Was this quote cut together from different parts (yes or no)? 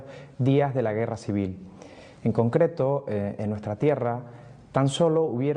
yes